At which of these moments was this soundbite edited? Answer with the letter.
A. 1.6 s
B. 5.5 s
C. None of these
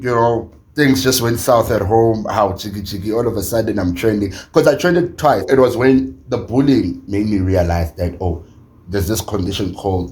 B